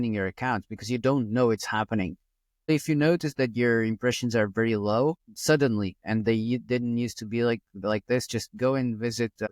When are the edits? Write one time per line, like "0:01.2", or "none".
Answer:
0:02.7